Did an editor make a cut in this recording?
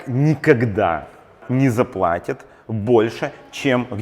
yes; 1 cut; at 1.4 s

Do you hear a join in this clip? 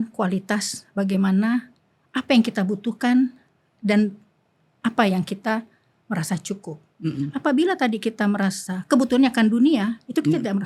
no; 0 cuts

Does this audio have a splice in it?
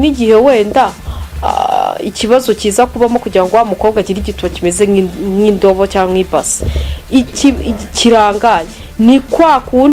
no; 0 cuts

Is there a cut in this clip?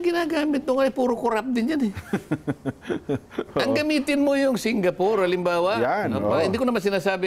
no; 0 cuts

